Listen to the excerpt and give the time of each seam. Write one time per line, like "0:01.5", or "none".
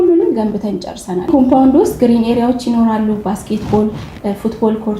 0:01.3